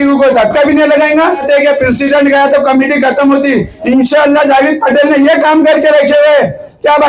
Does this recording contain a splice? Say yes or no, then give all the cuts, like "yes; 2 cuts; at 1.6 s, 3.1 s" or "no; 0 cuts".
yes; 1 cut; at 1.4 s